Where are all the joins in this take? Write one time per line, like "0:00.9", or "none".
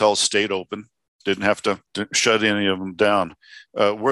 0:01.9